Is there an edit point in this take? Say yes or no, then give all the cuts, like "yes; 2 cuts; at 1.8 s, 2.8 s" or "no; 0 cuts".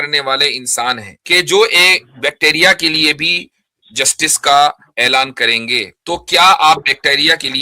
yes; 2 cuts; at 1.1 s, 5.9 s